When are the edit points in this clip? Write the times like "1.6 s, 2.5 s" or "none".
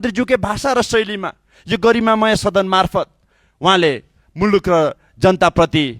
none